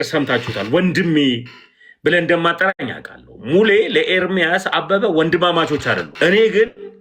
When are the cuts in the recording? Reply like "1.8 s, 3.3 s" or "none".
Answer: 6.1 s